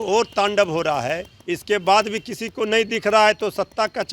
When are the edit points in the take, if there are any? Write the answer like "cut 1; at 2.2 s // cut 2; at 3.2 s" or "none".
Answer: none